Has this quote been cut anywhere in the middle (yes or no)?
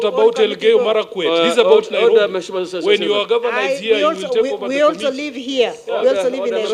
no